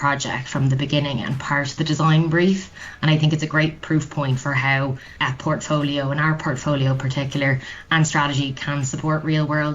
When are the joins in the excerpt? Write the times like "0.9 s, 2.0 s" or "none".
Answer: 5.1 s